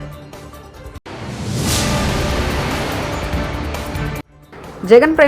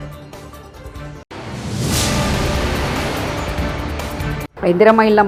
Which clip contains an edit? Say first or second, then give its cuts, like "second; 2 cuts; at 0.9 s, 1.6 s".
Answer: first; 2 cuts; at 1.0 s, 4.2 s